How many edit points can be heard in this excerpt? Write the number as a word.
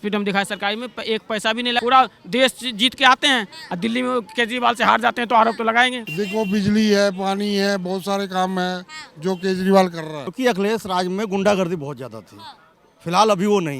three